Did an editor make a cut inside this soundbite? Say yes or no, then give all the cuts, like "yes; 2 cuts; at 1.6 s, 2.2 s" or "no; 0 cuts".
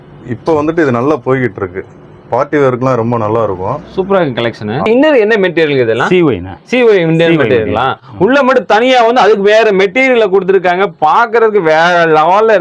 yes; 1 cut; at 4.9 s